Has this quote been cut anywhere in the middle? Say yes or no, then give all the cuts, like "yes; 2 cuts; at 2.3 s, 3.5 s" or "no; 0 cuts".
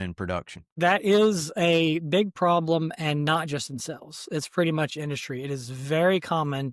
no; 0 cuts